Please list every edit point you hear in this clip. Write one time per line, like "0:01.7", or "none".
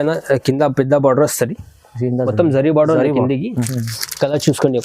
0:03.8